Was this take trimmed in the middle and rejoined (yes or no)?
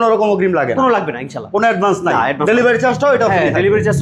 no